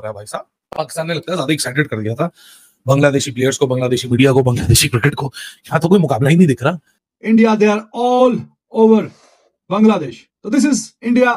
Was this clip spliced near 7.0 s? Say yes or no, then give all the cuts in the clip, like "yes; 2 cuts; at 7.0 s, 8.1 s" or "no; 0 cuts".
yes; 1 cut; at 7.0 s